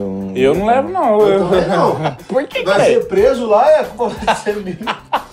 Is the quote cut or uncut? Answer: uncut